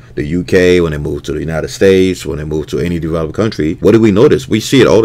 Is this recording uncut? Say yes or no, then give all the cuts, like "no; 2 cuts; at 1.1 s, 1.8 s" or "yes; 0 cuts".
no; 1 cut; at 3.8 s